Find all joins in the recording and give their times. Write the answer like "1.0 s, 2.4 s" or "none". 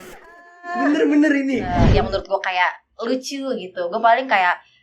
1.8 s